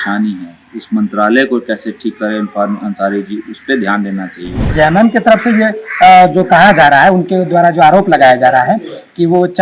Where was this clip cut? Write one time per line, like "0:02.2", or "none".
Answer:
0:04.7